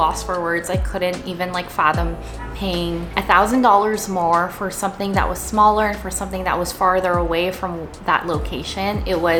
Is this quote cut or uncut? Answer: uncut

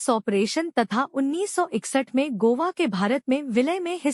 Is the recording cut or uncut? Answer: uncut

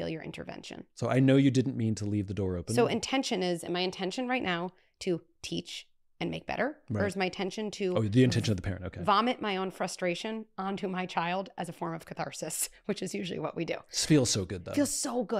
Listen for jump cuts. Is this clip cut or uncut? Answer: uncut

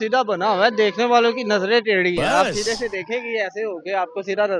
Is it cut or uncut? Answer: uncut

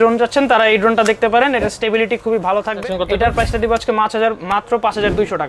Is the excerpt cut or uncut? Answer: cut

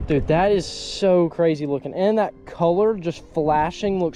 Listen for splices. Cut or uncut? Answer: uncut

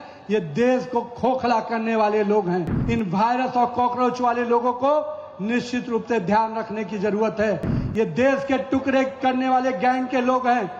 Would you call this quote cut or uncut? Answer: cut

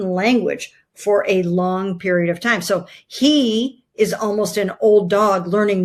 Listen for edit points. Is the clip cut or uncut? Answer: uncut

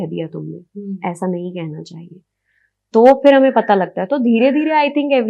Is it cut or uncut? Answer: uncut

